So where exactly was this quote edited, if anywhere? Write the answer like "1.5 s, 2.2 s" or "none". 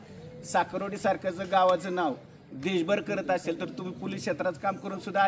none